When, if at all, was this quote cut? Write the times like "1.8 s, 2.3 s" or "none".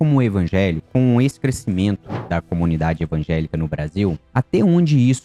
0.9 s, 2.1 s

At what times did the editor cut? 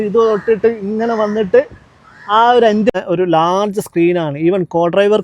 2.9 s

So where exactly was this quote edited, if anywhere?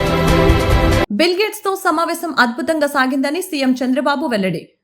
1.0 s

